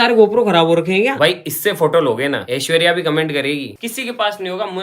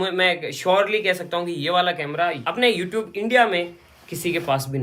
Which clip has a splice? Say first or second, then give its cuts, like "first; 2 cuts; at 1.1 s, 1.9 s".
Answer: first; 3 cuts; at 1.1 s, 2.5 s, 3.8 s